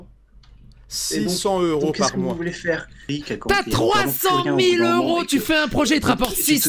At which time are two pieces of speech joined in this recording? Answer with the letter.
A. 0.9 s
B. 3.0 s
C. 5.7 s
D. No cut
B